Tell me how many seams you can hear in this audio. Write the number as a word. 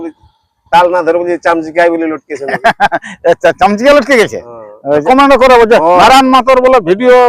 one